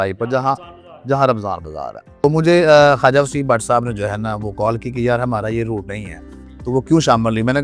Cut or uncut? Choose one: cut